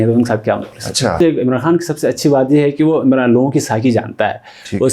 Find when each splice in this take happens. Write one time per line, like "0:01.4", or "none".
0:01.2